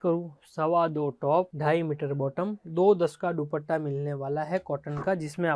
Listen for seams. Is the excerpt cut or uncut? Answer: uncut